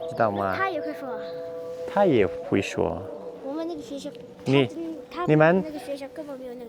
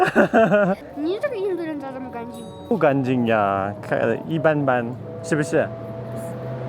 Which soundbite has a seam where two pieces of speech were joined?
second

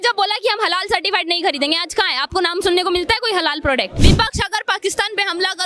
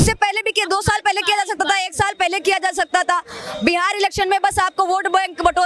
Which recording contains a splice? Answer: first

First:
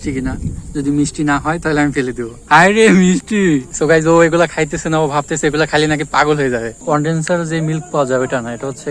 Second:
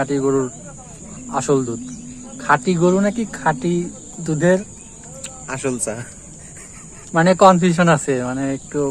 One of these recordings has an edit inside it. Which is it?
first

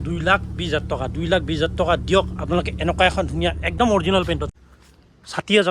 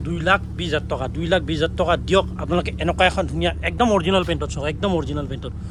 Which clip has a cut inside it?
first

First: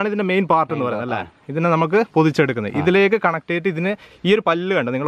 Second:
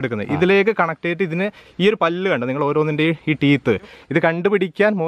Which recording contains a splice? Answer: second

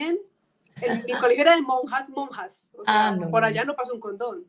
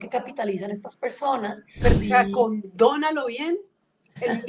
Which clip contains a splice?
second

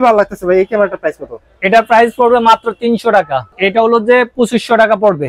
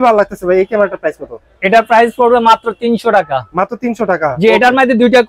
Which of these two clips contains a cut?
first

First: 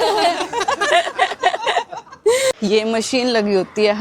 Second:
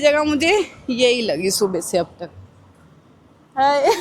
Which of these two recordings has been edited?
first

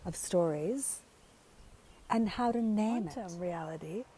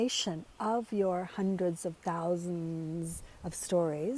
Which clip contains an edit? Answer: first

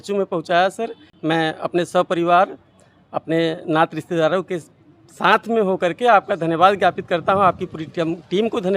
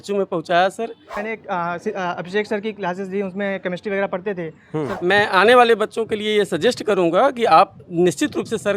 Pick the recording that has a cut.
second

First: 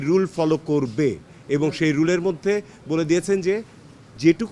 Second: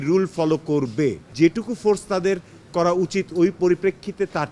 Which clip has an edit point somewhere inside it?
second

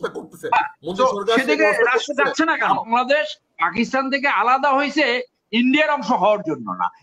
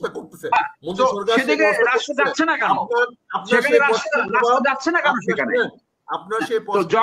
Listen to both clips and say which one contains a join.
first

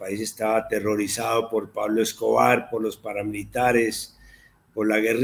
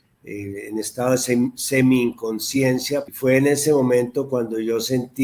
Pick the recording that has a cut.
second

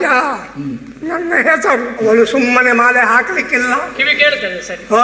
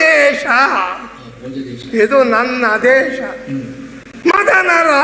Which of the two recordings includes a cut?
first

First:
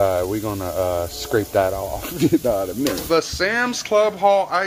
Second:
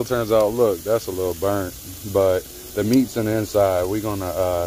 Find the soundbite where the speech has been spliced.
first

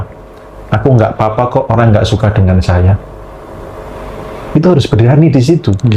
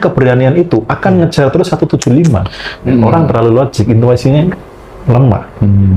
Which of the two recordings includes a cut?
second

